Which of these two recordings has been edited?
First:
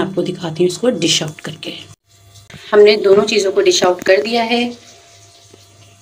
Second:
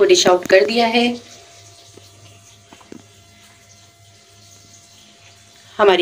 first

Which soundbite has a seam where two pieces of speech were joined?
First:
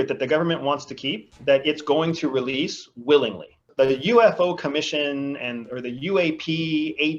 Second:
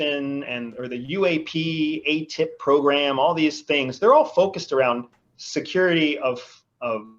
first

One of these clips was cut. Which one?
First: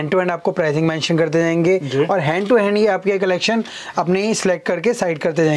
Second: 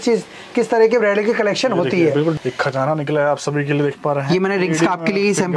second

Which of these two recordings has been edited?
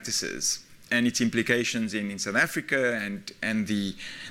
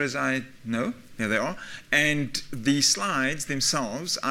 first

